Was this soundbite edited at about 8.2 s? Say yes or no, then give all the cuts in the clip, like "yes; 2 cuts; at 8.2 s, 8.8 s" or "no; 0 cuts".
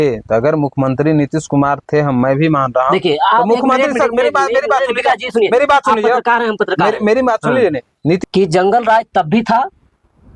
yes; 1 cut; at 8.2 s